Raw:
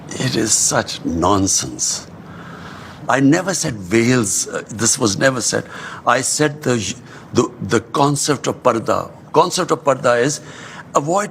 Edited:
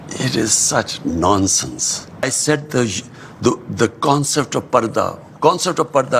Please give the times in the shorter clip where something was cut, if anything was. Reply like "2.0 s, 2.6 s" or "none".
2.2 s